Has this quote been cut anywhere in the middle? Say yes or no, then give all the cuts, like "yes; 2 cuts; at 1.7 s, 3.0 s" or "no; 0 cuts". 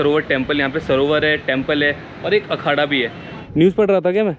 yes; 1 cut; at 3.3 s